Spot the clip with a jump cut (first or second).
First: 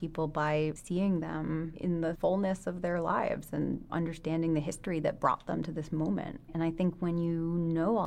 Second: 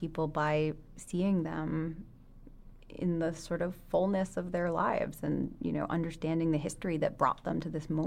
first